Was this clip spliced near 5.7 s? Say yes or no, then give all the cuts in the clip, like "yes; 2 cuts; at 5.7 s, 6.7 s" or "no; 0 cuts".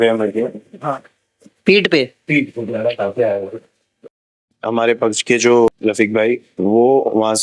yes; 2 cuts; at 4.5 s, 5.7 s